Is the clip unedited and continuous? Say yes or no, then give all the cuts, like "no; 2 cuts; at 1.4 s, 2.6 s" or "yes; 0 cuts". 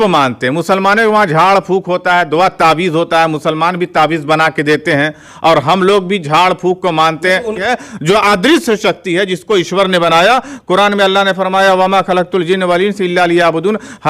no; 1 cut; at 7.7 s